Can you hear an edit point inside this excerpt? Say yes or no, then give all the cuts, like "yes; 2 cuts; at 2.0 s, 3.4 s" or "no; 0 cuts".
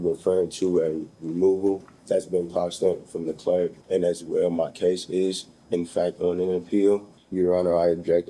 yes; 3 cuts; at 1.9 s, 3.8 s, 7.2 s